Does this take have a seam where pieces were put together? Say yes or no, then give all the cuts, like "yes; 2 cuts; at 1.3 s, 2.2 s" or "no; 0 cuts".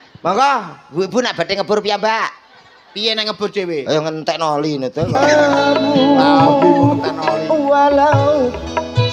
yes; 1 cut; at 5.2 s